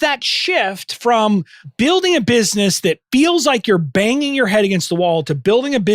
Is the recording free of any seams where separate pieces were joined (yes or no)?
no